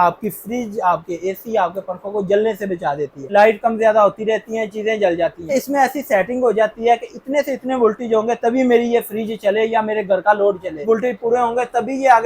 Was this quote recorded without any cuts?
no; 3 cuts; at 3.2 s, 5.5 s, 10.8 s

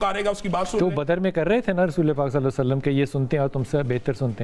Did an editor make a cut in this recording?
no; 0 cuts

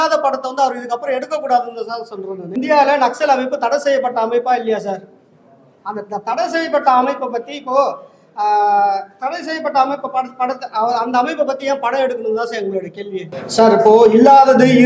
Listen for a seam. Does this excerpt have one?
yes; 2 cuts; at 2.5 s, 13.4 s

